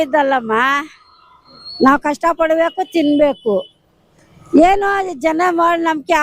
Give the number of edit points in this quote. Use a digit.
0